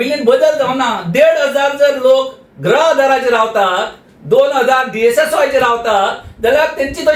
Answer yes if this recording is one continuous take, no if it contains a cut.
yes